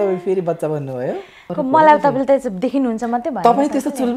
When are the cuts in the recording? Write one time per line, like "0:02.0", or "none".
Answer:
0:01.4